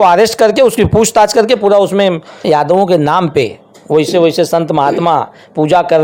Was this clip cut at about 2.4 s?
yes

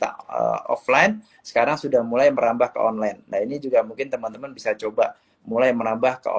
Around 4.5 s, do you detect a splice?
no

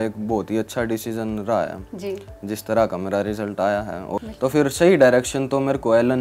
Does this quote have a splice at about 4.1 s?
yes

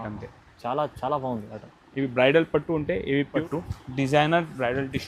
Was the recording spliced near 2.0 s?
no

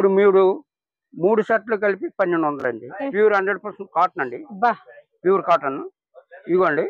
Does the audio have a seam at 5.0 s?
no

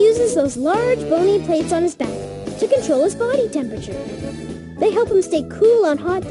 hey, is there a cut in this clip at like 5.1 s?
no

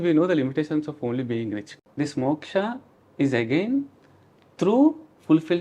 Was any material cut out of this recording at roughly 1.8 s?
yes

